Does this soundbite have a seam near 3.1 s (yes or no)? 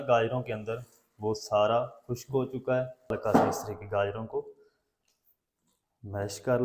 yes